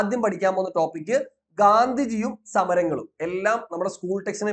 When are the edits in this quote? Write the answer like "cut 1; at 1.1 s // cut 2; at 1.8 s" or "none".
none